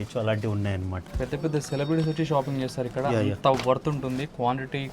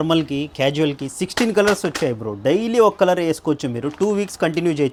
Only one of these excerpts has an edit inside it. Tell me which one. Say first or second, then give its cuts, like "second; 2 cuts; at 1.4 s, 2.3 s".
first; 1 cut; at 1.0 s